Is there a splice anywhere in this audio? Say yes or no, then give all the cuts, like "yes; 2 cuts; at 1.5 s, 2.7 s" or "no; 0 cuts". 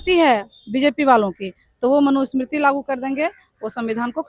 no; 0 cuts